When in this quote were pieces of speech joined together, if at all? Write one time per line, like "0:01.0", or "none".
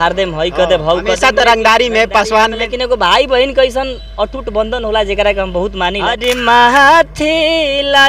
0:06.1